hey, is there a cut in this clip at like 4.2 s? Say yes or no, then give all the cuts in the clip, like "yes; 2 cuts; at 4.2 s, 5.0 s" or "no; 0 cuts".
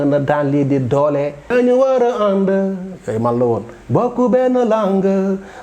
no; 1 cut; at 1.5 s